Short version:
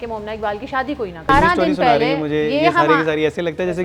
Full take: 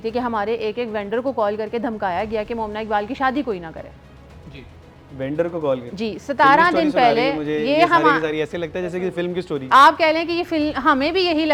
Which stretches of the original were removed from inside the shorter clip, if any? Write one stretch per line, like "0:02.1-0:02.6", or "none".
0:03.8-0:06.4